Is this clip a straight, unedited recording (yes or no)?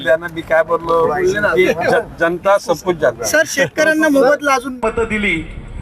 no